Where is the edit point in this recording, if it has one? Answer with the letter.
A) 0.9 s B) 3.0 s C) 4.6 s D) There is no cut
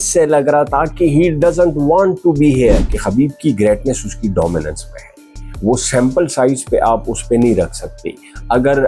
B